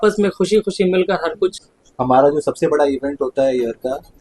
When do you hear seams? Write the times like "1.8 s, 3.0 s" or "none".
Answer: 1.5 s